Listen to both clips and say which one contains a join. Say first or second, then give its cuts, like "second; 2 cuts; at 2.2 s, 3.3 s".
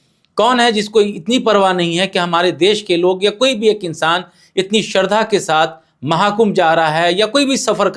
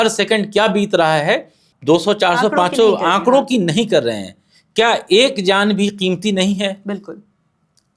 second; 1 cut; at 1.7 s